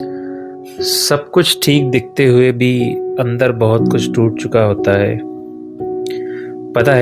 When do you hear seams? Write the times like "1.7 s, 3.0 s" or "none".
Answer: none